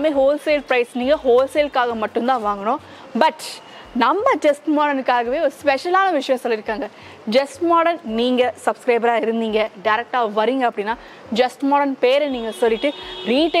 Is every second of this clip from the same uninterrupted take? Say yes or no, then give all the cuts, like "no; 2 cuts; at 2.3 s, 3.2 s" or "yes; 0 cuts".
yes; 0 cuts